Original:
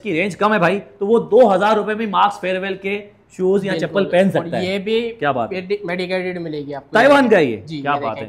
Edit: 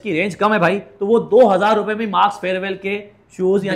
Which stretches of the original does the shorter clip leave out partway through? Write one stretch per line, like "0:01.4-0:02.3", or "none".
none